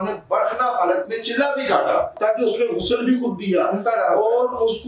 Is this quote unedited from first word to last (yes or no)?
no